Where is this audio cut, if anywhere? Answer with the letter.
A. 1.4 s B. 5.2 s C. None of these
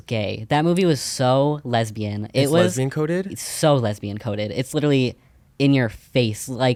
C